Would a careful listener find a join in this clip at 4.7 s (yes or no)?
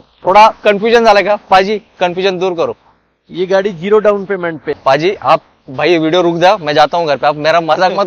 yes